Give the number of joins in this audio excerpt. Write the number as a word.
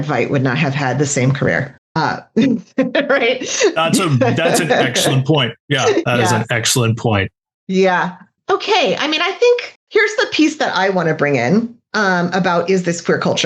three